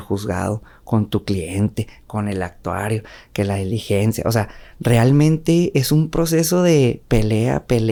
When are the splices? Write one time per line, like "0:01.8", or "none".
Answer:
none

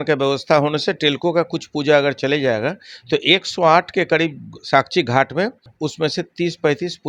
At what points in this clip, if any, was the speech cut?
0:05.6

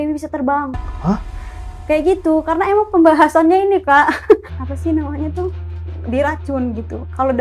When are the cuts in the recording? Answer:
0:04.6

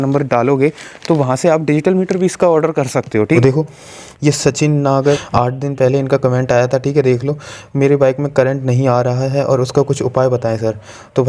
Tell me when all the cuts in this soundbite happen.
0:03.3
0:05.2

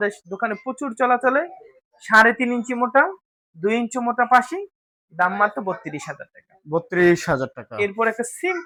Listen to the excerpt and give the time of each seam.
none

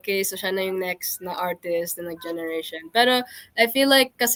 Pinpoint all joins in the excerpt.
none

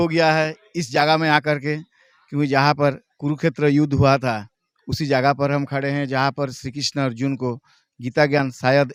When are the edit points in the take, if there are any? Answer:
none

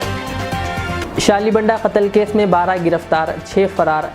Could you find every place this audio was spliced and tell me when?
0:01.0

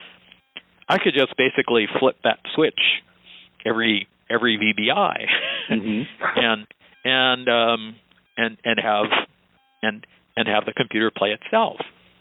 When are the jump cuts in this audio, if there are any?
none

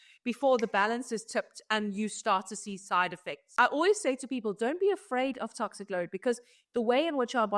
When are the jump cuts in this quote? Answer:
0:03.4

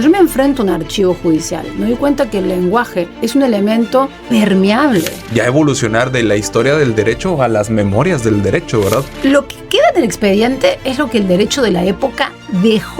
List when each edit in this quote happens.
0:03.2
0:04.2
0:05.2
0:09.1

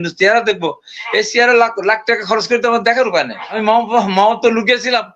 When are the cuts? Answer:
0:03.6

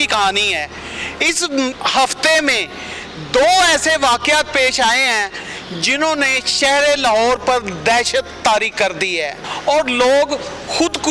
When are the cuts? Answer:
0:09.5

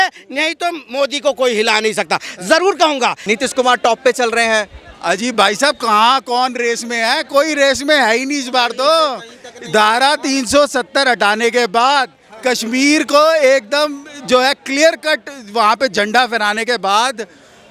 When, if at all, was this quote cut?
0:03.2

